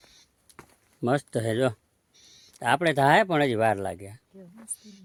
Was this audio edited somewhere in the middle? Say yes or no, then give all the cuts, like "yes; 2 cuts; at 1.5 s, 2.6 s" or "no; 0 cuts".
no; 0 cuts